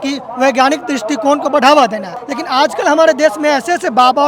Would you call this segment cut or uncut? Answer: uncut